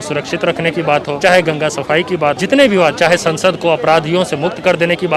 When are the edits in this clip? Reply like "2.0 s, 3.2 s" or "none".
1.1 s, 2.4 s